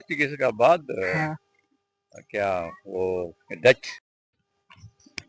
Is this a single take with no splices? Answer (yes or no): no